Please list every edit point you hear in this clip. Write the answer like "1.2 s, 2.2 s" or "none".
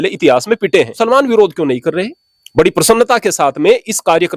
1.0 s